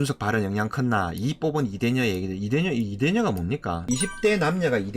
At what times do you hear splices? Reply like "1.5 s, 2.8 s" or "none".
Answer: 3.8 s